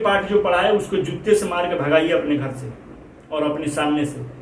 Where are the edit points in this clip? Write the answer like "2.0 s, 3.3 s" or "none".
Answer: none